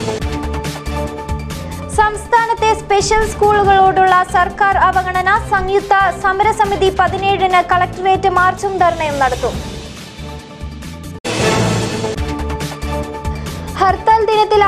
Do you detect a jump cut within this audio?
yes; 1 cut; at 1.2 s

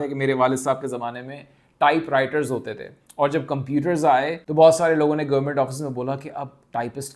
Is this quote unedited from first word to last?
yes; 0 cuts

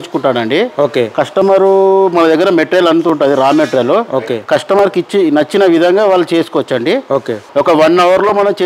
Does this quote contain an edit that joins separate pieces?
yes; 1 cut; at 7.4 s

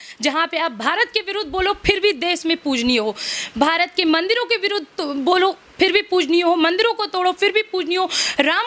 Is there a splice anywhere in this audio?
no; 0 cuts

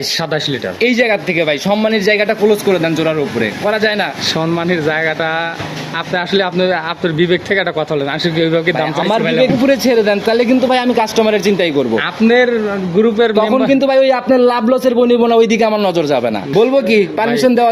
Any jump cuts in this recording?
yes; 1 cut; at 16.5 s

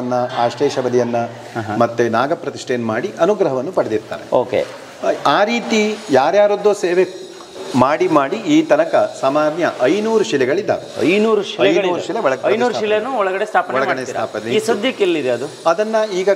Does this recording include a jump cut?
no; 0 cuts

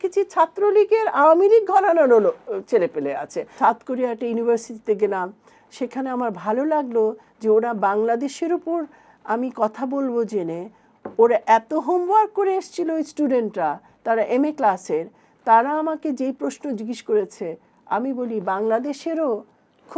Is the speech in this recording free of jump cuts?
no; 1 cut; at 3.5 s

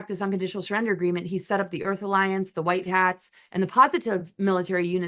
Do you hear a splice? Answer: no; 0 cuts

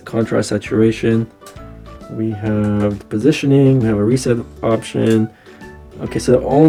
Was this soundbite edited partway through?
no; 0 cuts

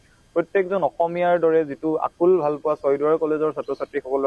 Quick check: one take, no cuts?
yes; 0 cuts

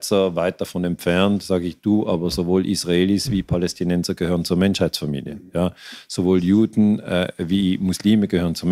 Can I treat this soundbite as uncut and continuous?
yes; 0 cuts

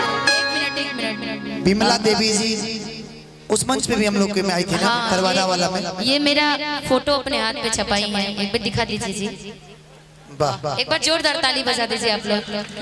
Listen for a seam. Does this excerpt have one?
no; 0 cuts

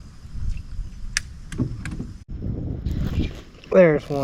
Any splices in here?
yes; 1 cut; at 2.2 s

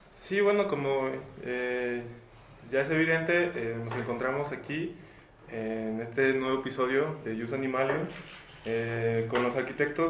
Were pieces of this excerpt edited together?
yes; 1 cut; at 2.2 s

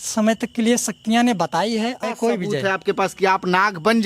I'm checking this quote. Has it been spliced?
yes; 1 cut; at 2.0 s

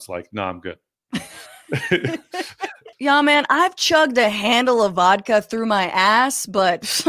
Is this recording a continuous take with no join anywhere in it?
no; 2 cuts; at 0.9 s, 2.8 s

